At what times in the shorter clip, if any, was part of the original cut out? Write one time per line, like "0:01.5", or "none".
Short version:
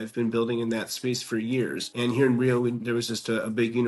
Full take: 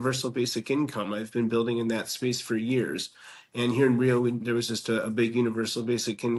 0:01.8